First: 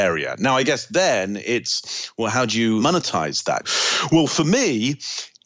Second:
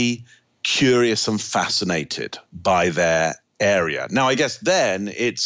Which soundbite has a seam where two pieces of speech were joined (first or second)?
first